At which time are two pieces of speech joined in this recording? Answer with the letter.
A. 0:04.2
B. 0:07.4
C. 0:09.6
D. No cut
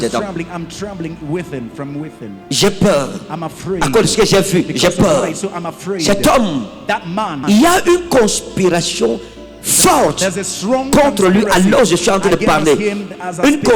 B